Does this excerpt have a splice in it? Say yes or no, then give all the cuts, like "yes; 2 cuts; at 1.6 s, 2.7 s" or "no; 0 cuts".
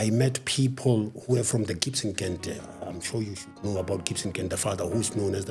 no; 0 cuts